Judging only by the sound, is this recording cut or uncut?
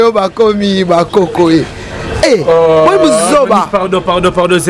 uncut